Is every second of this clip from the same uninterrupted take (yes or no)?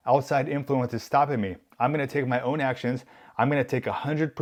yes